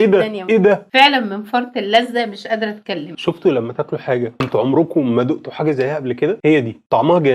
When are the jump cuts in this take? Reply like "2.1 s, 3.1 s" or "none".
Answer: 0.9 s, 3.1 s